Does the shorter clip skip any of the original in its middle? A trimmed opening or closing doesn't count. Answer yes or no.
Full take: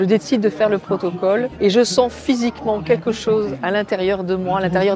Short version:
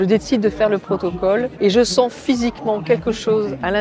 no